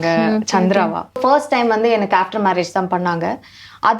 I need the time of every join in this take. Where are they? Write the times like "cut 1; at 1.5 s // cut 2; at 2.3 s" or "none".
cut 1; at 1.2 s